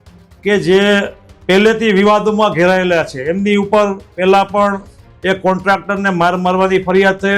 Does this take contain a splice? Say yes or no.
no